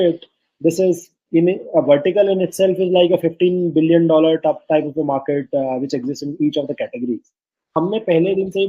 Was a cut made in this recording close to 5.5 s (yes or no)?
no